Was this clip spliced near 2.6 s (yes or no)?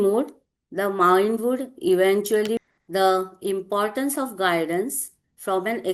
yes